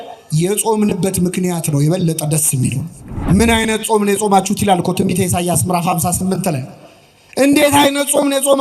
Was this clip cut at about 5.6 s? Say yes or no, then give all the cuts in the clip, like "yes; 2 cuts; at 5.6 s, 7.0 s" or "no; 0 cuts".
no; 1 cut; at 3.1 s